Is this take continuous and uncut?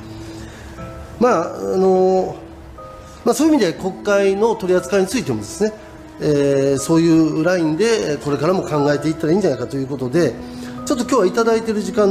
yes; 0 cuts

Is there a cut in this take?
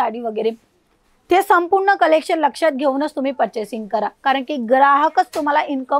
no; 0 cuts

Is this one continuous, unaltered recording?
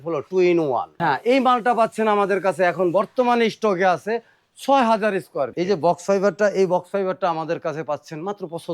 no; 2 cuts; at 0.9 s, 5.5 s

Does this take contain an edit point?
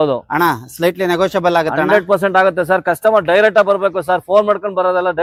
no; 0 cuts

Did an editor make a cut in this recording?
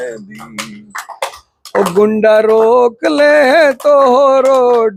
no; 0 cuts

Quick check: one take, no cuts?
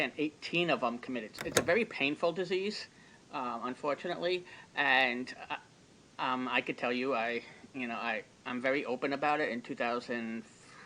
no; 1 cut; at 1.4 s

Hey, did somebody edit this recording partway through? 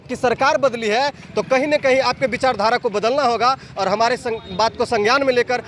no; 0 cuts

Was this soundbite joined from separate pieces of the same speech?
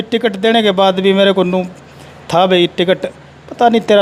no; 0 cuts

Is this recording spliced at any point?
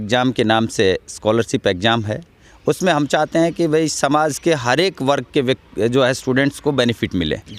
no; 0 cuts

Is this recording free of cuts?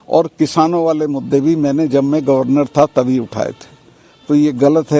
yes; 0 cuts

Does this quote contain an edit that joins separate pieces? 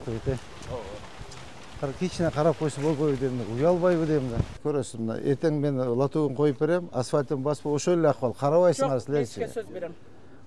yes; 1 cut; at 4.6 s

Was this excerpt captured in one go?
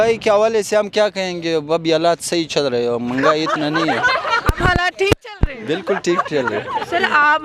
yes; 0 cuts

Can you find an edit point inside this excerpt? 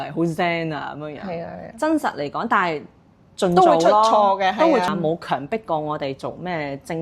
yes; 1 cut; at 4.9 s

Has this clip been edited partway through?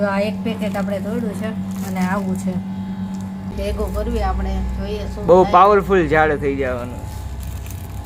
yes; 1 cut; at 3.5 s

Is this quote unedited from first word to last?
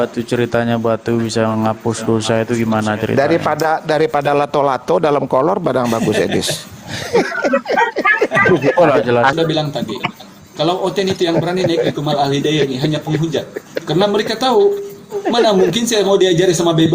no; 1 cut; at 9.3 s

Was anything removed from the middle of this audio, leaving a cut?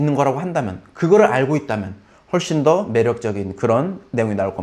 no; 0 cuts

